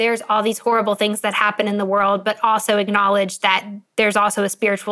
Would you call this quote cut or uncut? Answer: uncut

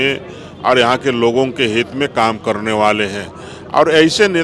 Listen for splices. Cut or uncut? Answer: uncut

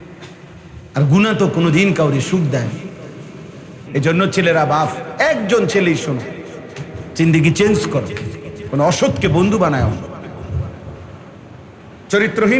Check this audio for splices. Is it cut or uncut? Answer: cut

